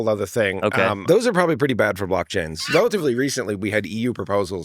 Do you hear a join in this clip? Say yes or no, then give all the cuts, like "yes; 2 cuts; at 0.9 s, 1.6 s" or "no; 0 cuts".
yes; 2 cuts; at 1.0 s, 2.6 s